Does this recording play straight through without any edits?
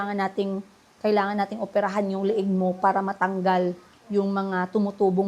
yes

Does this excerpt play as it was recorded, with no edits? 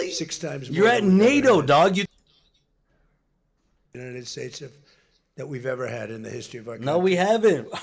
yes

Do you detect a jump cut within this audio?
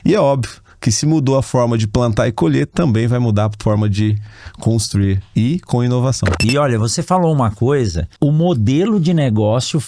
yes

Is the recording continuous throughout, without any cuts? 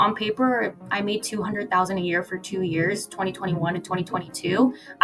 yes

